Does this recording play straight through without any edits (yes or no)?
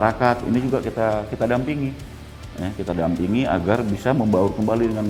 yes